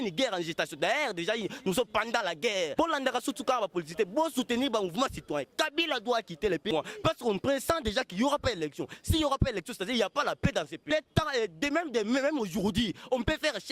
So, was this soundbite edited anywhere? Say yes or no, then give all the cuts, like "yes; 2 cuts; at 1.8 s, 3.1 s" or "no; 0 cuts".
yes; 3 cuts; at 2.7 s, 6.7 s, 10.9 s